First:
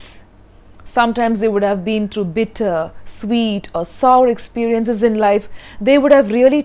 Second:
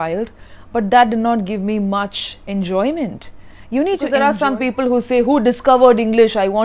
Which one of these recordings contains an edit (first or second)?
second